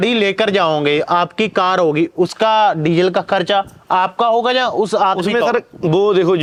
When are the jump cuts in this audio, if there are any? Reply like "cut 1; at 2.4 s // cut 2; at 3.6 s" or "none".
none